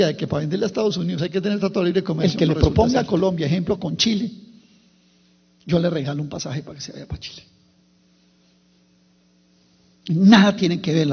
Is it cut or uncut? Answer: cut